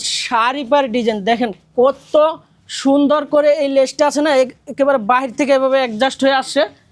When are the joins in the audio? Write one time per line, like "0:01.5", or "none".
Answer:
none